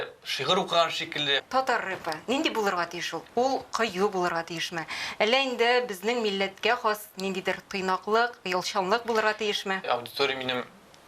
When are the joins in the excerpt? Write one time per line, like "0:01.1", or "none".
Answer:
0:01.4
0:09.8